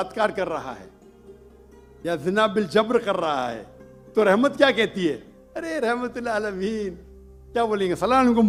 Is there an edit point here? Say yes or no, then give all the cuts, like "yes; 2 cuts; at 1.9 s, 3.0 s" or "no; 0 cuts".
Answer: no; 0 cuts